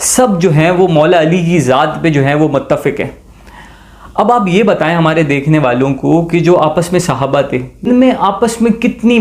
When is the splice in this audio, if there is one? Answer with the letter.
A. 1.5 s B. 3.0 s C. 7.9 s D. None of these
C